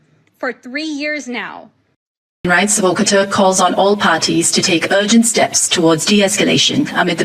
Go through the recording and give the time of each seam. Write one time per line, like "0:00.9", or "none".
0:02.5